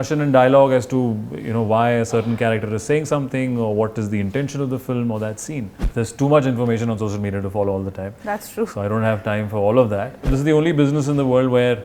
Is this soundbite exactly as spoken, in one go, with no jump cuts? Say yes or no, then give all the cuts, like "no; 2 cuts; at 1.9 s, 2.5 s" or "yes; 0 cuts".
no; 2 cuts; at 5.8 s, 10.3 s